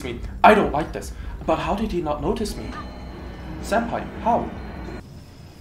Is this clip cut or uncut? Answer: cut